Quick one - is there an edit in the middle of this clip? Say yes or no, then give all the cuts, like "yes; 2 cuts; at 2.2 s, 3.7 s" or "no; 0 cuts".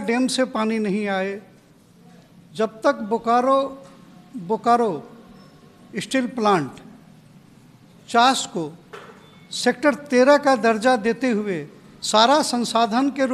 no; 0 cuts